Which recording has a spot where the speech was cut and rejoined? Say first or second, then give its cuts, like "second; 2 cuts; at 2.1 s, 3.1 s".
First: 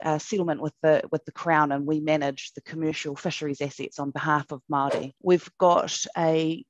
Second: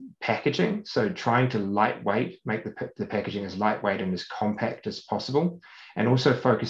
first; 1 cut; at 5.1 s